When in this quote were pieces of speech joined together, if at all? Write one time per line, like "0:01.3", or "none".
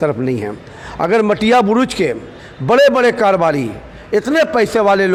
none